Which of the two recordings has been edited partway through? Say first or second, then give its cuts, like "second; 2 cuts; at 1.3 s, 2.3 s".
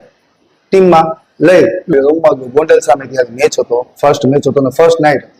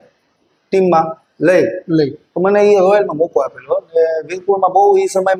first; 1 cut; at 1.9 s